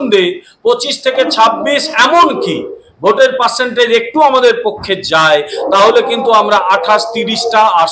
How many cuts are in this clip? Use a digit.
0